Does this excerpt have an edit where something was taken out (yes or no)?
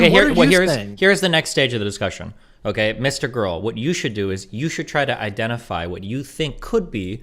no